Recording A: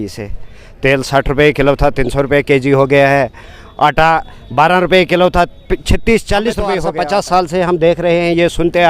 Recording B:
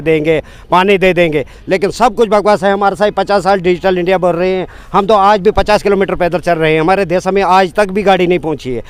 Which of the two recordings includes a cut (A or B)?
A